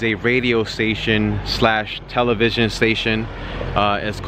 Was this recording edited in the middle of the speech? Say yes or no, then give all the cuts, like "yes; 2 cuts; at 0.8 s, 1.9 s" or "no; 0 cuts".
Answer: no; 0 cuts